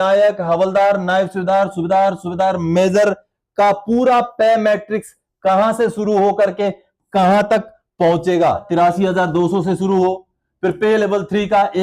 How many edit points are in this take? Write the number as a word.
one